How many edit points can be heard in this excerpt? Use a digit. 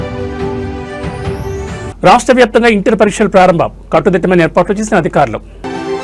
1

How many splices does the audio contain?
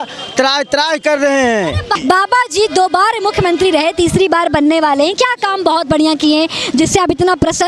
1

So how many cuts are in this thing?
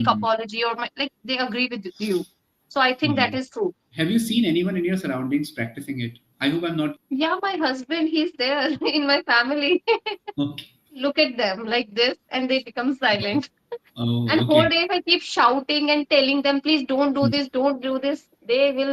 3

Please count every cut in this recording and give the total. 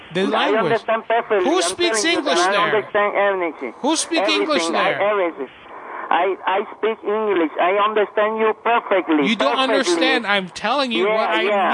0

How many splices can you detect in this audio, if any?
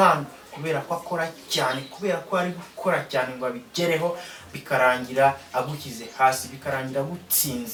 0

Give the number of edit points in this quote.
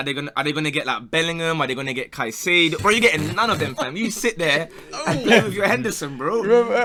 0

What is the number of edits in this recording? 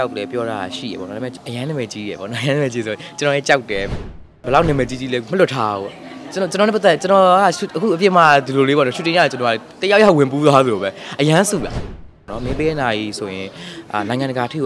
3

